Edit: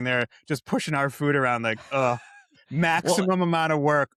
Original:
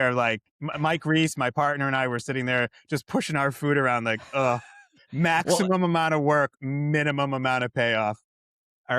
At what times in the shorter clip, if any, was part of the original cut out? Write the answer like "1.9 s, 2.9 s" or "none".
none

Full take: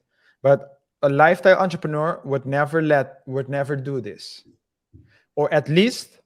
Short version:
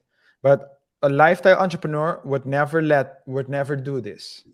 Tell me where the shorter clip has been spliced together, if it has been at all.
none

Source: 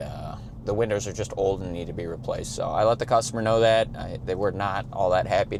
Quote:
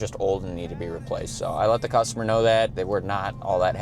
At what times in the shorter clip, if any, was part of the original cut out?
2.8 s

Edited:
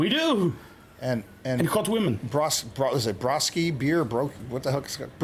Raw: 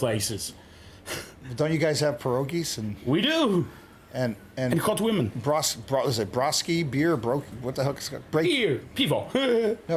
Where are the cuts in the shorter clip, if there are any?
none

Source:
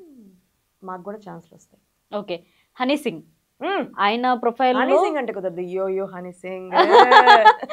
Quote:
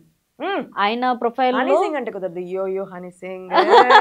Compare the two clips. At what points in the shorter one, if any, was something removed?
none

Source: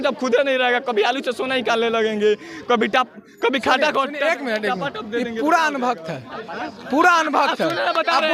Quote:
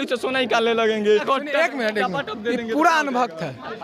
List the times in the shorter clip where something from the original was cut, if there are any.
1.2 s

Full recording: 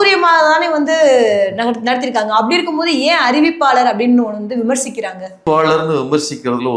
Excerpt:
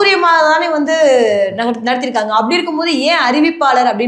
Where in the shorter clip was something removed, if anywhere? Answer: none

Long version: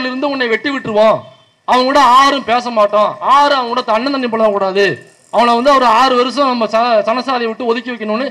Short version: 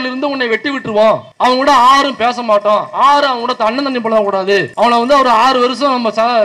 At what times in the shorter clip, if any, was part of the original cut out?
1.3 s, 4.7 s

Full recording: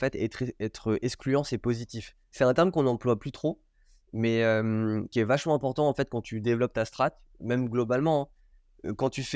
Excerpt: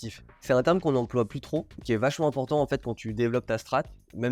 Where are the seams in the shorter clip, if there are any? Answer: 1.8 s

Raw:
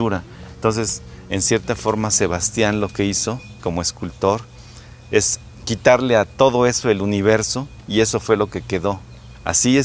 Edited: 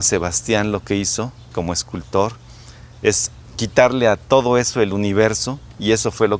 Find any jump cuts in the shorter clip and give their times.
none

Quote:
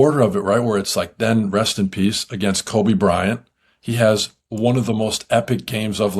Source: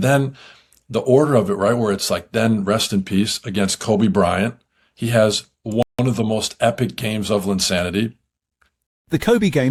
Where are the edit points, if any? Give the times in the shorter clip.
4.7 s

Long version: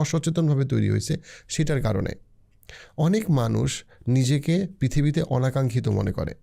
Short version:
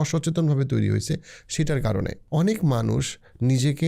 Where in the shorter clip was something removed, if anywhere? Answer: 2.2 s

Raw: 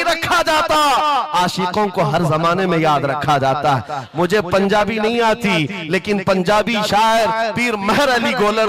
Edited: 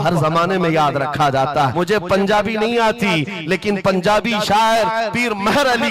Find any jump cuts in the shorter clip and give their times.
1.7 s

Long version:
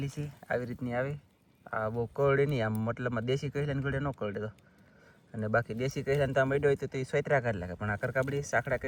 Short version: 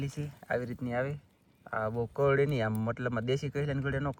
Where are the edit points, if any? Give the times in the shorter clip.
none

